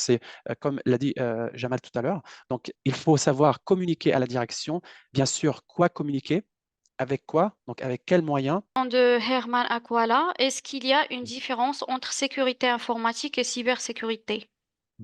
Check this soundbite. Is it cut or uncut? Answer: cut